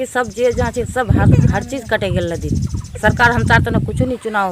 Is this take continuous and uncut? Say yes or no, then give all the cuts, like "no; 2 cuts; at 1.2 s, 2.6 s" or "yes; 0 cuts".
yes; 0 cuts